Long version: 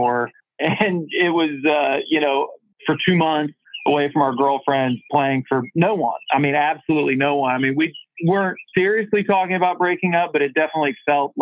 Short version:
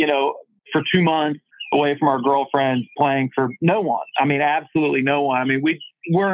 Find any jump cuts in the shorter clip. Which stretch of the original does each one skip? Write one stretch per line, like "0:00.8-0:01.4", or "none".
none